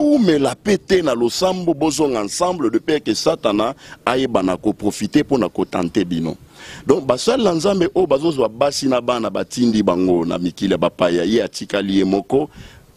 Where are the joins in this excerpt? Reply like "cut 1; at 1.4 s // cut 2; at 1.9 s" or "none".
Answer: none

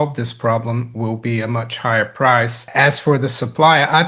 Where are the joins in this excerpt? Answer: cut 1; at 2.6 s

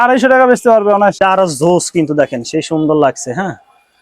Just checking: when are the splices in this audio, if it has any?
cut 1; at 1.2 s

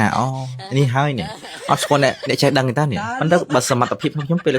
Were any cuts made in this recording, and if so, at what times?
cut 1; at 3.1 s

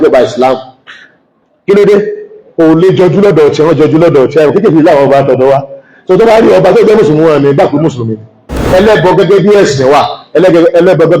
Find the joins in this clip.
cut 1; at 8.6 s

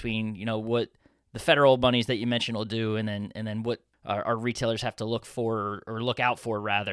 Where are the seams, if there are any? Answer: cut 1; at 3.9 s

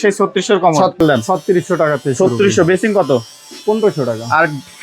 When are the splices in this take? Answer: cut 1; at 1.0 s

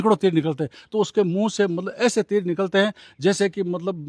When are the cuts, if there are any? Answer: none

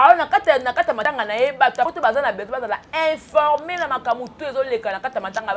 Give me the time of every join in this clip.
cut 1; at 1.0 s // cut 2; at 1.9 s

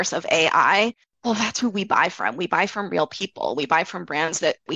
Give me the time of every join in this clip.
cut 1; at 1.1 s

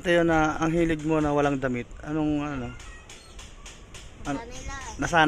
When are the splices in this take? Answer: none

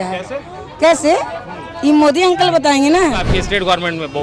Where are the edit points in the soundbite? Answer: cut 1; at 3.2 s

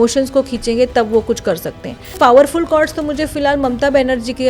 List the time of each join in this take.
cut 1; at 2.2 s

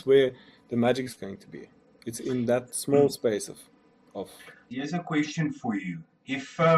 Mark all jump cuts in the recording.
none

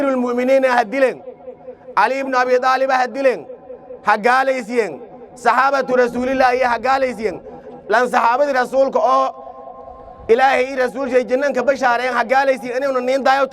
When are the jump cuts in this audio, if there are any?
none

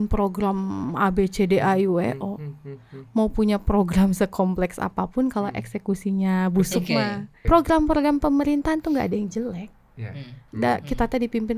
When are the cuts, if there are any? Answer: cut 1; at 7.3 s // cut 2; at 10.5 s

